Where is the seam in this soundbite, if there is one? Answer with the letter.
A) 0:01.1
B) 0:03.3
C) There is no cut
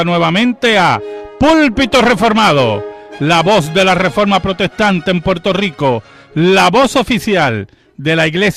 C